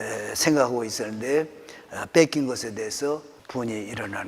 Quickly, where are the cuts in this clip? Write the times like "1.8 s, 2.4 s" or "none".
3.4 s